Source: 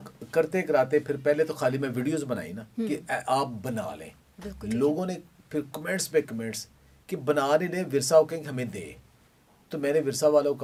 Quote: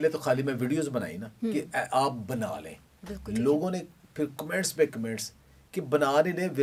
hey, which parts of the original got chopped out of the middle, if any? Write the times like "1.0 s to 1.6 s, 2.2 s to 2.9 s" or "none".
none